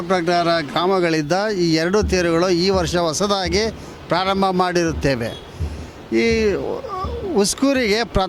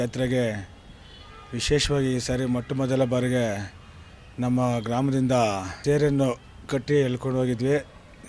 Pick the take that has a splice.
second; 1 cut; at 5.7 s

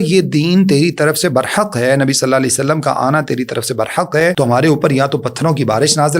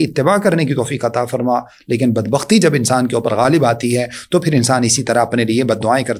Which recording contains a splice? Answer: first; 1 cut; at 4.3 s

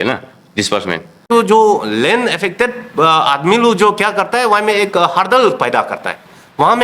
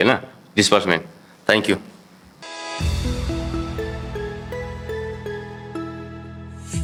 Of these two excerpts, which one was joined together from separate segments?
first; 1 cut; at 1.3 s

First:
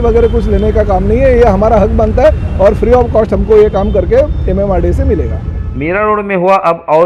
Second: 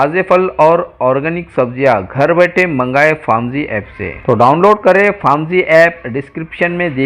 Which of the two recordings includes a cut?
first; 1 cut; at 5.5 s

